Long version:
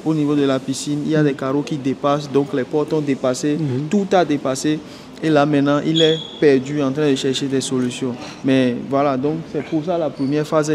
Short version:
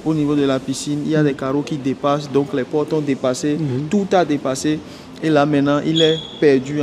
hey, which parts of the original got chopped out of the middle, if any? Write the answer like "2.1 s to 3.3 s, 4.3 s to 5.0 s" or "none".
none